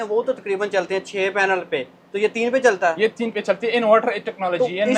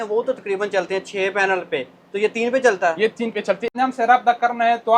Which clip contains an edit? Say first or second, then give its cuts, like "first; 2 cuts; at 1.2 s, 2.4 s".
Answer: second; 1 cut; at 3.7 s